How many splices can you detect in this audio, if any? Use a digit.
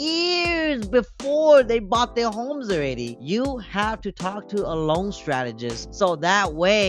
1